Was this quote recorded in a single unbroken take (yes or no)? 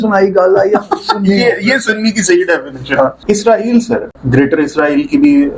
no